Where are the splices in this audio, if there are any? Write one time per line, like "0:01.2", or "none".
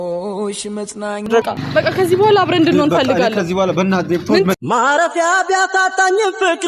0:01.4
0:04.5